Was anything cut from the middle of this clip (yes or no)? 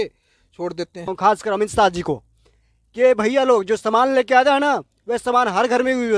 yes